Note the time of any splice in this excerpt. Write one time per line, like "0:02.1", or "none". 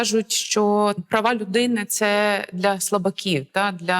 0:01.0